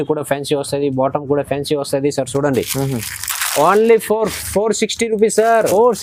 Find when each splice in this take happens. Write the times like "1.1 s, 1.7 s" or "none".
none